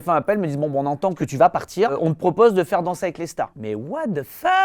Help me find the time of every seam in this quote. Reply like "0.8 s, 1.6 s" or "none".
1.2 s, 3.6 s